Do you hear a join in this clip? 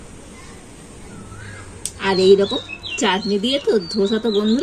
yes; 1 cut; at 2.0 s

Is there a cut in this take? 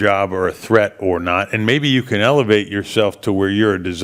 no; 0 cuts

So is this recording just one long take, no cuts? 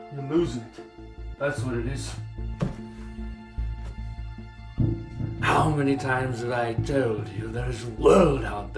yes; 0 cuts

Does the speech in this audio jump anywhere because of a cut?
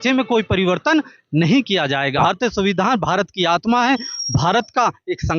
yes; 1 cut; at 2.2 s

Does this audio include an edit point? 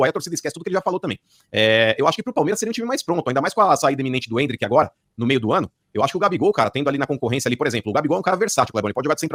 no; 0 cuts

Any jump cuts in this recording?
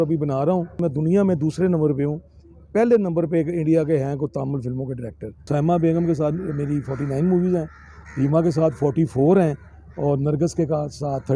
yes; 2 cuts; at 0.8 s, 5.4 s

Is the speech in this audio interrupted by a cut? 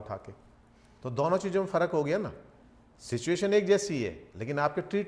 no; 0 cuts

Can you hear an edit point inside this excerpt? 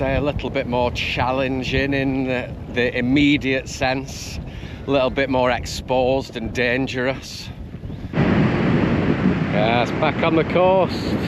yes; 1 cut; at 8.0 s

